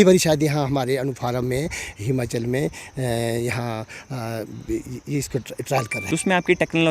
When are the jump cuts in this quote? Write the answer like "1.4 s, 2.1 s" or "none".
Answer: 6.0 s